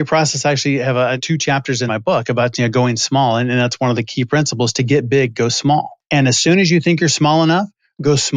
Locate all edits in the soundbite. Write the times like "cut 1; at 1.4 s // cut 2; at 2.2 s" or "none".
cut 1; at 1.7 s // cut 2; at 6.0 s